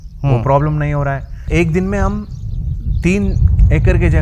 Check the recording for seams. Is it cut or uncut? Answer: cut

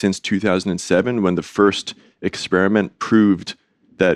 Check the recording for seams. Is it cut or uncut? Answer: uncut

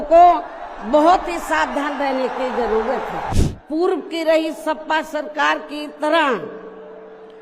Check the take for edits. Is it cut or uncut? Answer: cut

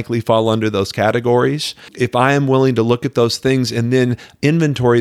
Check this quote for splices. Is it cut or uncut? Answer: cut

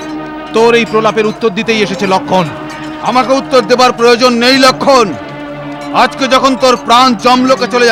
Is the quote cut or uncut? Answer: uncut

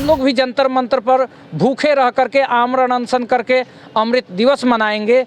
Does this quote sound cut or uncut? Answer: uncut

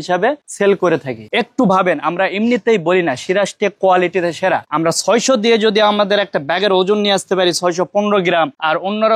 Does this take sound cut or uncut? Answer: cut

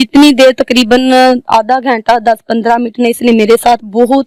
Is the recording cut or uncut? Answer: uncut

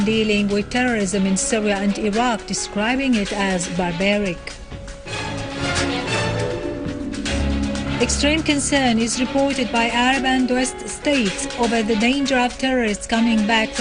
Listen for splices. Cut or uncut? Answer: cut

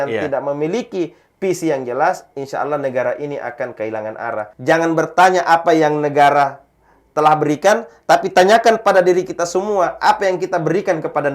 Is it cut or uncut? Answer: cut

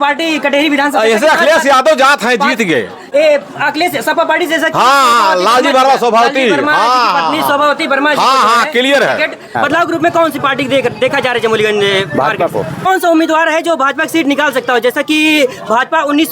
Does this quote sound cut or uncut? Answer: cut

